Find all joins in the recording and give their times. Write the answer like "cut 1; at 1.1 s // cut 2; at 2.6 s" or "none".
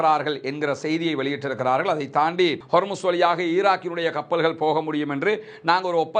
cut 1; at 2.6 s

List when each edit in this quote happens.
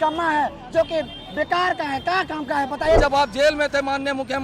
cut 1; at 3.0 s

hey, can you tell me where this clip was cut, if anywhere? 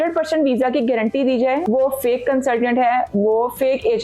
cut 1; at 1.6 s

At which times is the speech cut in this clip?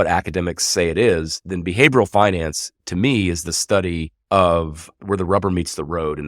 cut 1; at 4.1 s // cut 2; at 4.8 s

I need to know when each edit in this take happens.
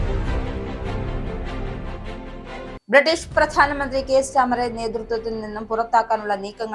cut 1; at 2.8 s

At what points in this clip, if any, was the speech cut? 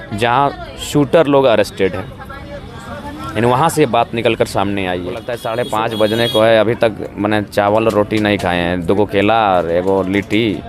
cut 1; at 5.4 s

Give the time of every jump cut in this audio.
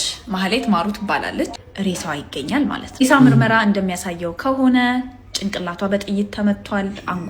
cut 1; at 1.6 s

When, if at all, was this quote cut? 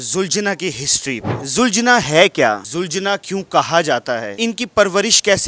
cut 1; at 1.4 s // cut 2; at 2.6 s // cut 3; at 4.3 s

